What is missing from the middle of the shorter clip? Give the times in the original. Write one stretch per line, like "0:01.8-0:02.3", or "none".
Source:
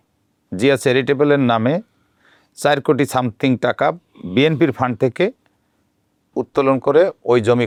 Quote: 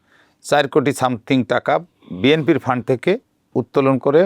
0:05.5-0:06.2

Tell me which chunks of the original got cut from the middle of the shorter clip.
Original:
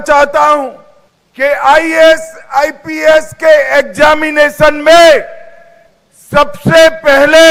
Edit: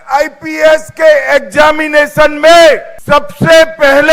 0:05.3-0:06.2

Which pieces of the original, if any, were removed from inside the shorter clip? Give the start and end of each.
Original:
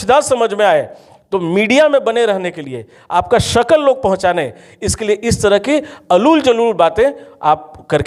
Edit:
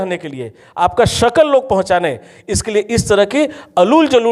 none

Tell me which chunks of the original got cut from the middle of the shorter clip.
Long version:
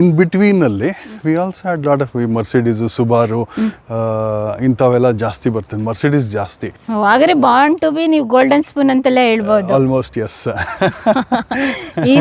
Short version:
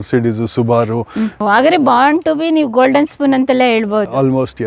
0:03.8-0:06.9

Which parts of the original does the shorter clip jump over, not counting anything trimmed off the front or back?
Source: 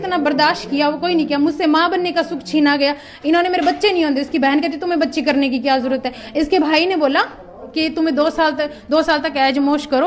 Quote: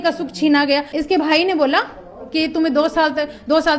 0:03.0-0:06.3

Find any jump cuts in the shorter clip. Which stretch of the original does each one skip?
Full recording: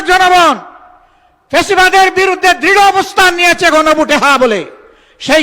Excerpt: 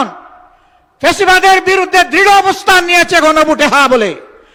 none

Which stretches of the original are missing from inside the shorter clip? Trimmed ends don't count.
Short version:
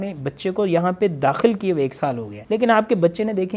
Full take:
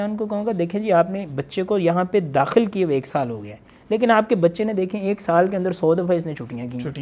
0:03.4-0:03.7

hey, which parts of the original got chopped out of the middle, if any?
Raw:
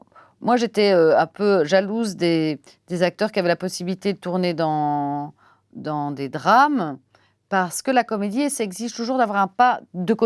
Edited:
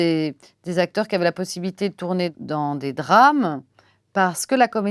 0:04.5-0:05.7

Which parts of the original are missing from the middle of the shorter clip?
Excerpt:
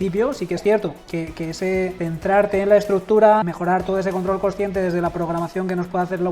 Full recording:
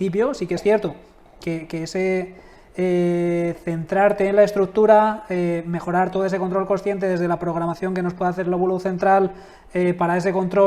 0:01.0-0:01.3
0:02.3-0:03.6
0:05.2-0:05.8

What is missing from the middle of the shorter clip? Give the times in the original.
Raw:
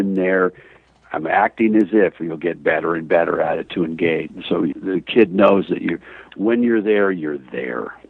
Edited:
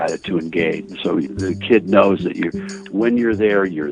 none

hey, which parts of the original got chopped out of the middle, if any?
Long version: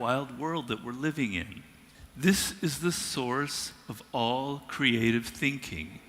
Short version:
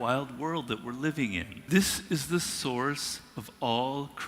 0:01.5-0:02.0

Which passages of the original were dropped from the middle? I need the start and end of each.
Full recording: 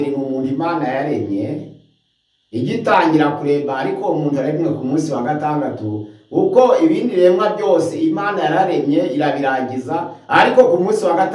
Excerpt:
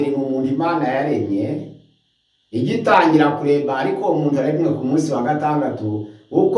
none

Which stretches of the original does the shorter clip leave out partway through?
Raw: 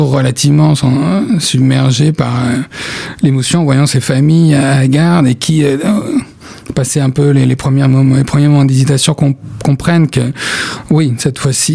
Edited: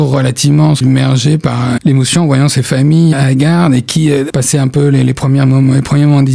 0:00.8-0:01.5
0:02.5-0:03.2
0:04.5-0:04.7
0:05.8-0:06.7

